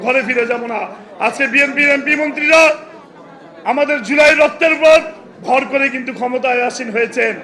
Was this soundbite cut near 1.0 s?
no; 0 cuts

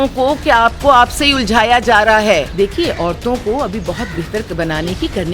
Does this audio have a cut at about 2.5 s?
yes; 1 cut; at 2.5 s

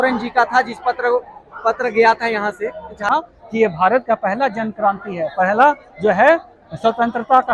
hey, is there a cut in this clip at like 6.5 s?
no; 1 cut; at 3.1 s

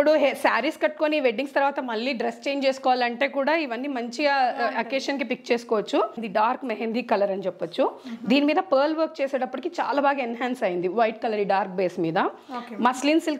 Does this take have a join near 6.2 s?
yes; 1 cut; at 6.2 s

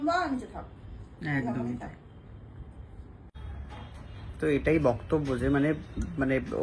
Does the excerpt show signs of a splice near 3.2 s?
yes; 1 cut; at 3.2 s

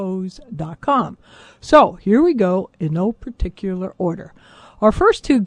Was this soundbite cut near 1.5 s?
yes; 1 cut; at 1.5 s

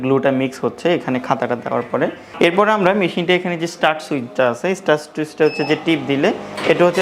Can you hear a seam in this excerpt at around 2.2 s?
yes; 1 cut; at 2.2 s

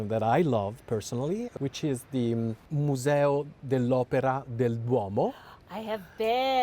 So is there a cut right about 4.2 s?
no; 2 cuts; at 1.5 s, 2.6 s

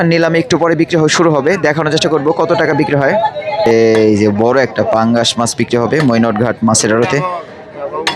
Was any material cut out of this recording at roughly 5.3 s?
no; 1 cut; at 3.7 s

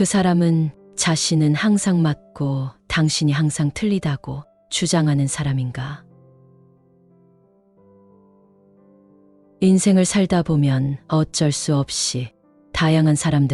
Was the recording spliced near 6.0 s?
yes; 2 cuts; at 6.0 s, 9.6 s

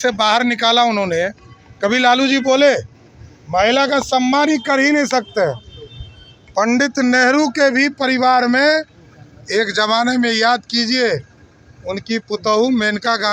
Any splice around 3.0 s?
no; 0 cuts

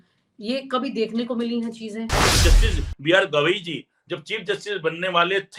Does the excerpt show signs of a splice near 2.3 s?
yes; 1 cut; at 2.3 s

